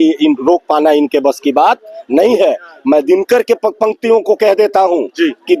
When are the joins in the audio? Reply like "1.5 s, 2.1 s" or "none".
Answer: none